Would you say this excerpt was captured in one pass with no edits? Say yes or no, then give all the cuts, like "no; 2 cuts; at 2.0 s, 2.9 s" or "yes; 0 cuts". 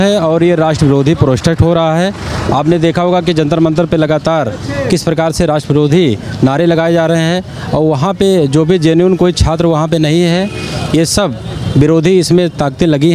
yes; 0 cuts